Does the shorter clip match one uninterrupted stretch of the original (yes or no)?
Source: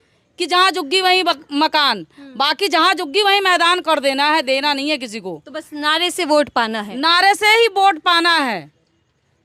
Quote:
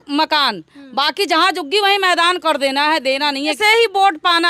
no